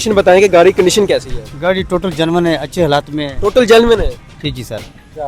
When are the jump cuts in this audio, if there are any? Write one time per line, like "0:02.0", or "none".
none